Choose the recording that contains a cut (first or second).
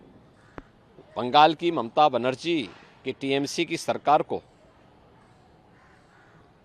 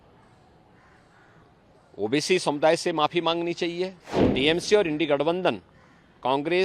second